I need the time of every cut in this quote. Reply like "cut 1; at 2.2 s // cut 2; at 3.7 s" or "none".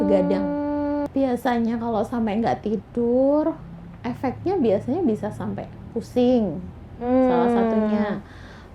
cut 1; at 1.1 s